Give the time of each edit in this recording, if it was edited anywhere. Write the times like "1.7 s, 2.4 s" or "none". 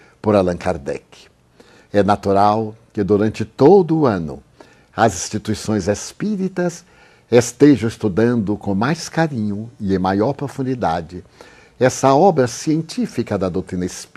10.3 s